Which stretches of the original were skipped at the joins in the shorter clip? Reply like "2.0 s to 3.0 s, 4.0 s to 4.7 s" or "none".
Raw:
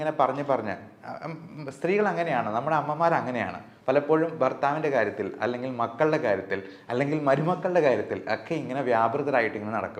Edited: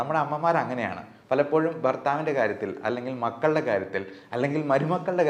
none